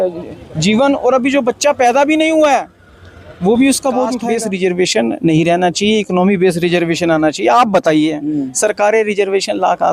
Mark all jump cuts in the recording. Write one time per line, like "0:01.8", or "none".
0:04.2